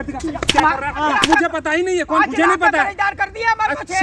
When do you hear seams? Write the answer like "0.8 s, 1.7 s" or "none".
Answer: 1.0 s, 2.2 s